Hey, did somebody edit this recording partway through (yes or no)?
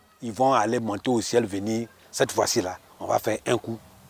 no